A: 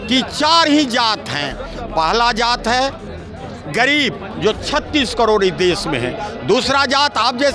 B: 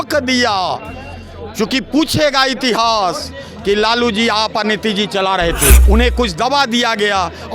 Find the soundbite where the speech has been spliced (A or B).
B